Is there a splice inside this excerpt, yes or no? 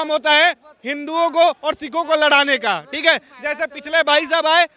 no